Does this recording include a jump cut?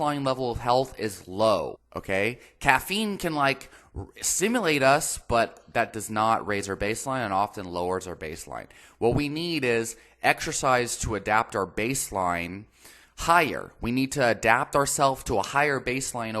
yes; 1 cut; at 1.9 s

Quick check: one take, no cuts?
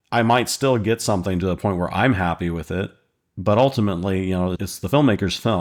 yes; 0 cuts

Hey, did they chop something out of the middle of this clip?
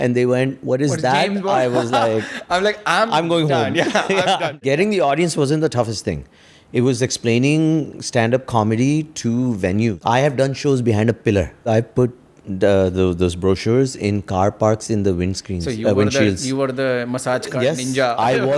yes; 3 cuts; at 4.6 s, 10.0 s, 11.7 s

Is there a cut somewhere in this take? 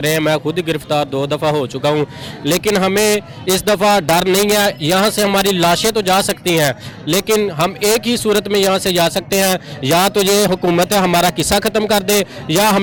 no; 0 cuts

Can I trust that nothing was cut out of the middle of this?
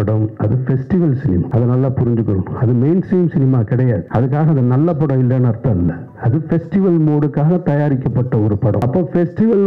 no; 3 cuts; at 1.5 s, 4.0 s, 8.8 s

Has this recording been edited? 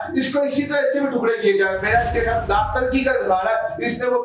no; 0 cuts

